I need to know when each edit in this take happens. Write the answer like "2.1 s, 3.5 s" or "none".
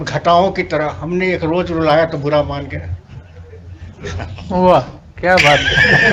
none